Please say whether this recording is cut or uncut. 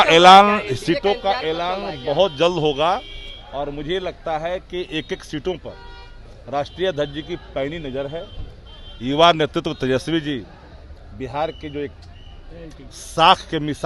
uncut